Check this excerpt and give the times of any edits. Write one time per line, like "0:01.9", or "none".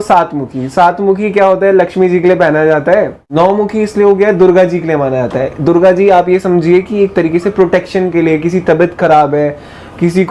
0:03.3